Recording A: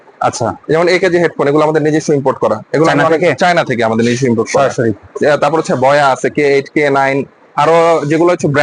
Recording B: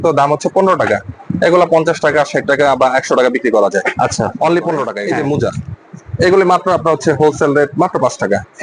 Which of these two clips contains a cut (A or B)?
B